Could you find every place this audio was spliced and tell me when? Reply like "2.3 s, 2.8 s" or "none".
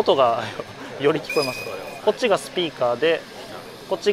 1.9 s